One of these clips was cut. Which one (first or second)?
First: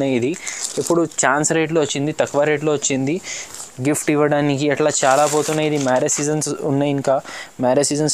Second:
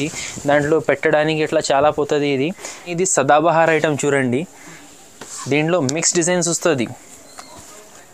second